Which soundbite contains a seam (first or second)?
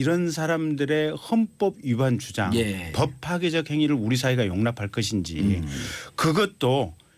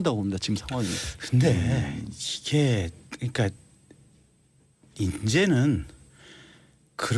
second